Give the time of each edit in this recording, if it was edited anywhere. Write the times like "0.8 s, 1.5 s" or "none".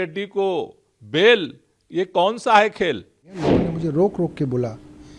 3.2 s